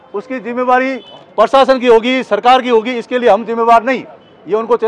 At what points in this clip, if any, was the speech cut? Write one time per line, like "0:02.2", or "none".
none